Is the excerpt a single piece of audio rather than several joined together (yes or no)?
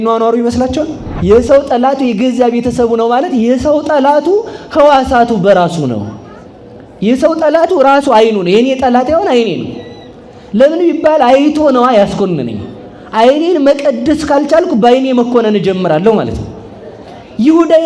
no